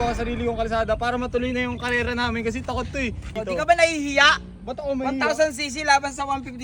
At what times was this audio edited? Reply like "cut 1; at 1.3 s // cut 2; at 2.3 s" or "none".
cut 1; at 3.3 s